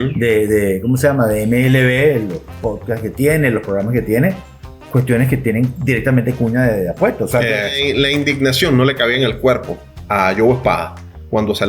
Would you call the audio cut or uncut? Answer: cut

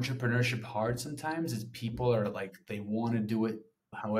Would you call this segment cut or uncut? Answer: uncut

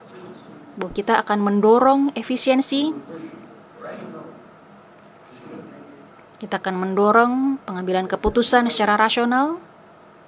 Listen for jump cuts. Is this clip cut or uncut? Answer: uncut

